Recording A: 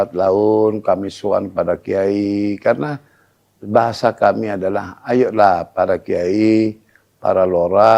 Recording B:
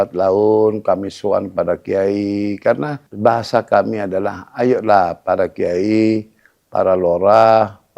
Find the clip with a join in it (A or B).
B